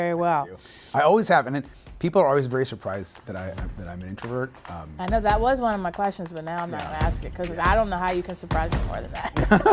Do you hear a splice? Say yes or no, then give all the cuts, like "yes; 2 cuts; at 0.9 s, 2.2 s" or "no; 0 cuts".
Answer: no; 0 cuts